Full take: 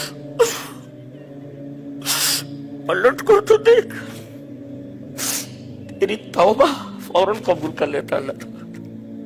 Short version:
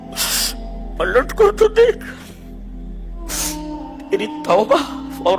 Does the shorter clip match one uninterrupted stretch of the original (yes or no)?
yes